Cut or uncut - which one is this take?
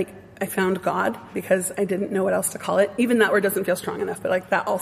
cut